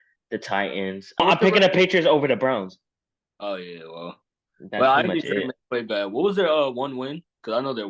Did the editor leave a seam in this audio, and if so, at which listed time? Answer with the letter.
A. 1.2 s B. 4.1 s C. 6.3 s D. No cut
A